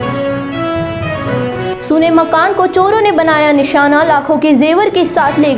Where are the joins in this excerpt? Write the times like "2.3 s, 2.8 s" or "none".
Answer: 1.6 s